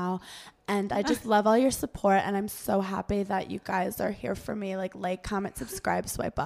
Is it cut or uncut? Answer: uncut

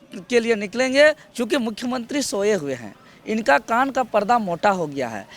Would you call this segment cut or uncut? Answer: uncut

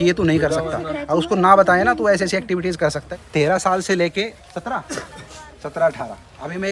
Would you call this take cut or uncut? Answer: cut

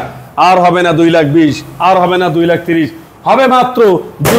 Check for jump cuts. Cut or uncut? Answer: uncut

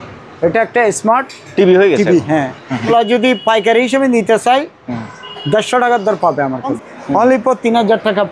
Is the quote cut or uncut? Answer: cut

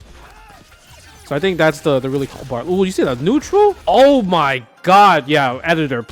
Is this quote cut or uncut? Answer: uncut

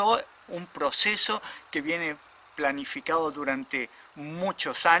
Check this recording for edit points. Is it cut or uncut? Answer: uncut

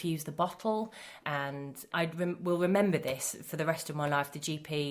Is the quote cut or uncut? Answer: cut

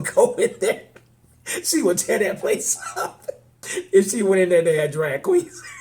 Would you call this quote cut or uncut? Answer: cut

